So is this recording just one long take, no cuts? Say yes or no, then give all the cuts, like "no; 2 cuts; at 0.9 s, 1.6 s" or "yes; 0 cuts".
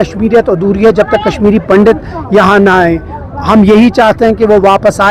yes; 0 cuts